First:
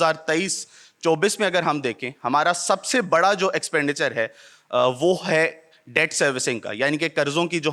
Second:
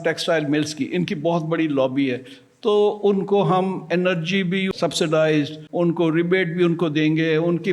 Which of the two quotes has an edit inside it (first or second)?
second